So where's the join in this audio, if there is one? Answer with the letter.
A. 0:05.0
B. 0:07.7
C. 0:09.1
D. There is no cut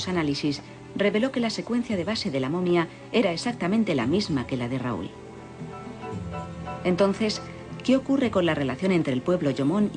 A